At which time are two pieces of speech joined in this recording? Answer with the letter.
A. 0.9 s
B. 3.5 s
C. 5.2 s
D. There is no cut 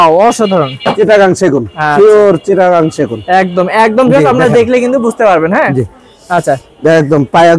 A